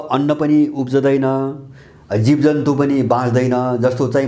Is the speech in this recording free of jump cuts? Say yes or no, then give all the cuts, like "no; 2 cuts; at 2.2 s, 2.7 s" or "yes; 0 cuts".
yes; 0 cuts